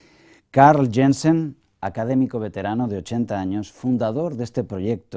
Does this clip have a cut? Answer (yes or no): yes